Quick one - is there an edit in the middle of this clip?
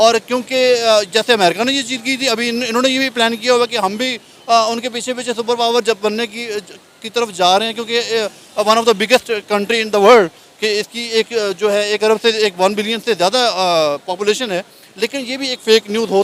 no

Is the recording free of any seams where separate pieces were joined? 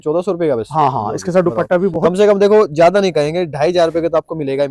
yes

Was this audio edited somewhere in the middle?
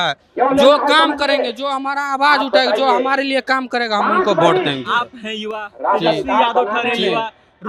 no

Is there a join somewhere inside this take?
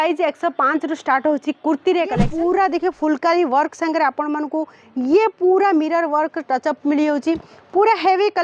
yes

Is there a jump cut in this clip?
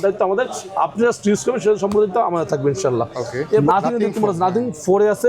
yes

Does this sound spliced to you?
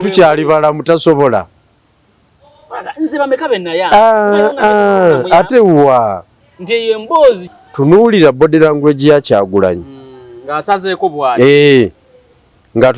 yes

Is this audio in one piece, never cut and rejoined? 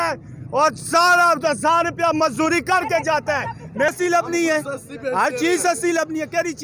no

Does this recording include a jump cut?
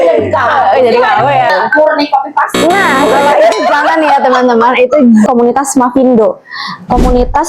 yes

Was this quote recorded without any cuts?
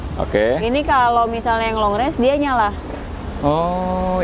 yes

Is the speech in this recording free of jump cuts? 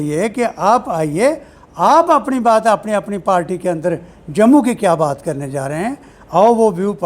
yes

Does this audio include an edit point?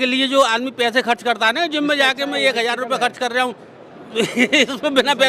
no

